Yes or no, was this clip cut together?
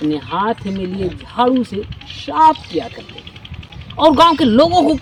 no